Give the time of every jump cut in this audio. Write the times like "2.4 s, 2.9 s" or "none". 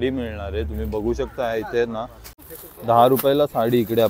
2.4 s

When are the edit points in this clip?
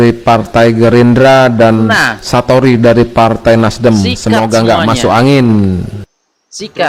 none

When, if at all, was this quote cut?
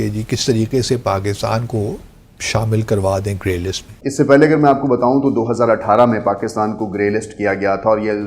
3.8 s

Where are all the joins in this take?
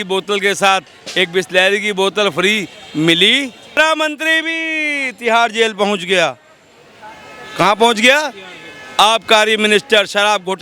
3.8 s

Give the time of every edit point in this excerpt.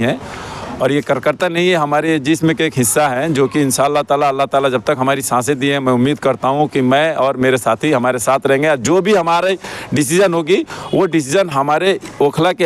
none

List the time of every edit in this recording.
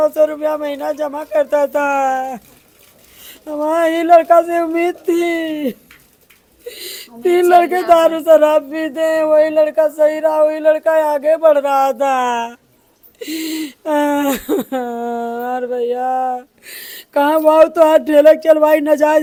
none

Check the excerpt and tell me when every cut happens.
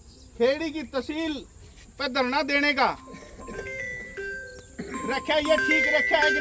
none

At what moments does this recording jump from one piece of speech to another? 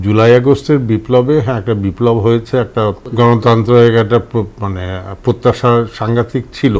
3.0 s

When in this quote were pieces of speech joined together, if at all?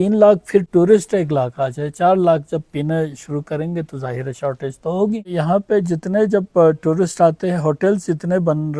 5.3 s

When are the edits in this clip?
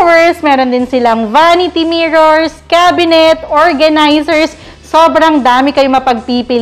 none

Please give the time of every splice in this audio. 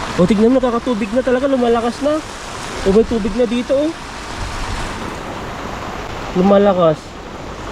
6.1 s

